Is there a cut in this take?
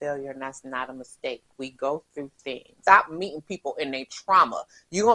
yes; 1 cut; at 2.7 s

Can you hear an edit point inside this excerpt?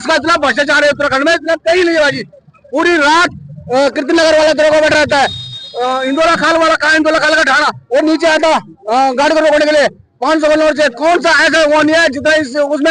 no; 0 cuts

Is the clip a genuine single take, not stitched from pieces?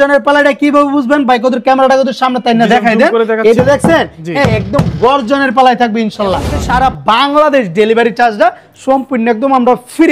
no; 1 cut; at 6.5 s

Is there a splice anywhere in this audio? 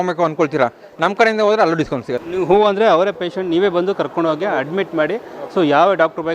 yes; 1 cut; at 2.2 s

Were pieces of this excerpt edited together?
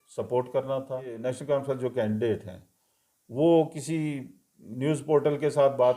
yes; 1 cut; at 1.2 s

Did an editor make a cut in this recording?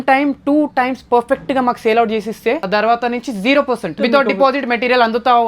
yes; 2 cuts; at 2.7 s, 3.9 s

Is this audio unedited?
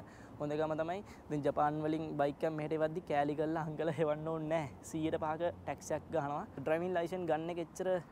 no; 1 cut; at 6.5 s

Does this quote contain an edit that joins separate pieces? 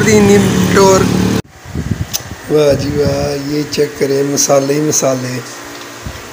yes; 1 cut; at 1.5 s

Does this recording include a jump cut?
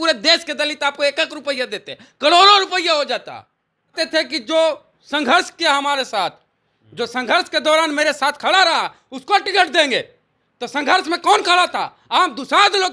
yes; 1 cut; at 3.9 s

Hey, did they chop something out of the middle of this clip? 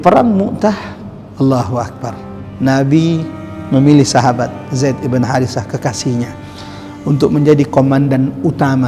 no; 0 cuts

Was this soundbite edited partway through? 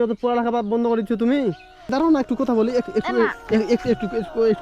yes; 1 cut; at 1.9 s

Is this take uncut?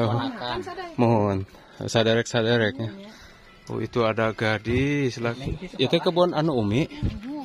no; 1 cut; at 5.4 s

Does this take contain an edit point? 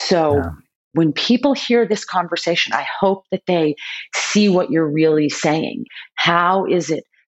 yes; 2 cuts; at 0.9 s, 5.9 s

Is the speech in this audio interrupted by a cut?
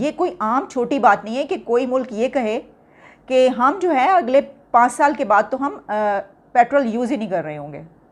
no; 0 cuts

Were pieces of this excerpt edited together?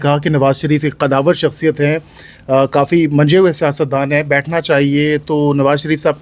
no; 0 cuts

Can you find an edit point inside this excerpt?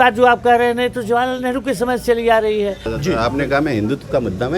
yes; 1 cut; at 2.9 s

